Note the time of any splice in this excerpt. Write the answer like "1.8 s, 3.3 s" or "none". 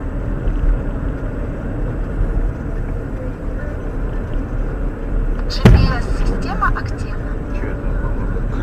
5.1 s